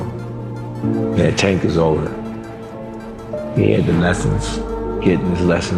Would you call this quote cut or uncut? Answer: uncut